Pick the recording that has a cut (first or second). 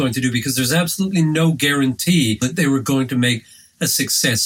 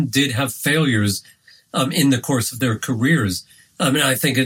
first